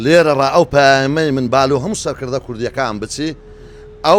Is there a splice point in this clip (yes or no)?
no